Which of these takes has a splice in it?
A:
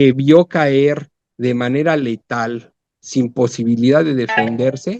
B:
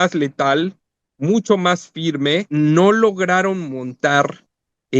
B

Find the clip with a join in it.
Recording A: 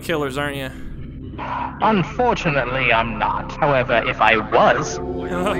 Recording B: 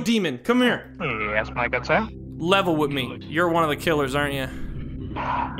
B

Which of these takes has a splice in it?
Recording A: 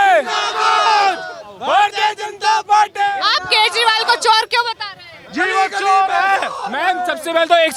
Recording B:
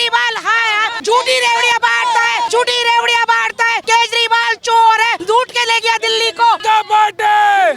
B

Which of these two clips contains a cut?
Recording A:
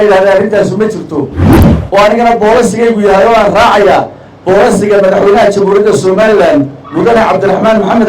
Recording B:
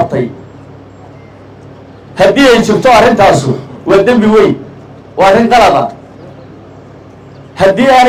A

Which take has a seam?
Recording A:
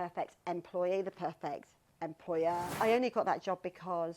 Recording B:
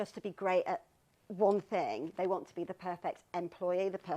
A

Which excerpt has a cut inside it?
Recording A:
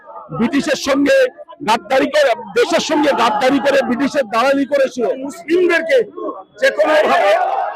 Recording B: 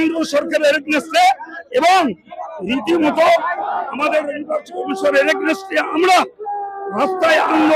A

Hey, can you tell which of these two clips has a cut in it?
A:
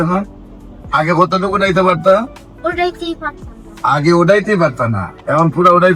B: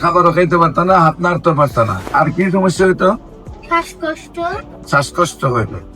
B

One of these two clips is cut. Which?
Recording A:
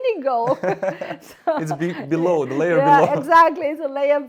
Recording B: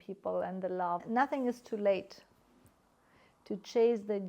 B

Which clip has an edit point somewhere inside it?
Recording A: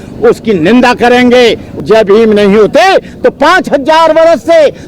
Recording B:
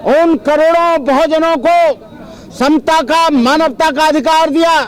A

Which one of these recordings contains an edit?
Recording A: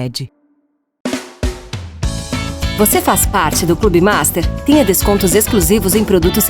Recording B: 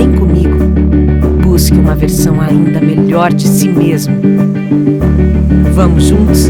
A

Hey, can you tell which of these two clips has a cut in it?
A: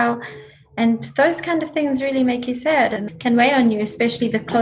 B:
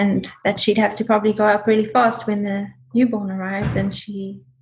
A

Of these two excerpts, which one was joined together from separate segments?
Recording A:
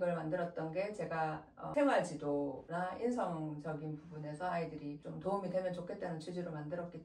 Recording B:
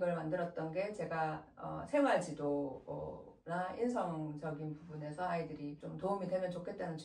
A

